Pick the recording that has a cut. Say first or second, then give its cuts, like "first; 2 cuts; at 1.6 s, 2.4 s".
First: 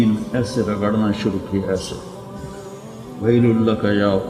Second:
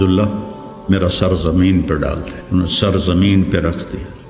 second; 1 cut; at 2.3 s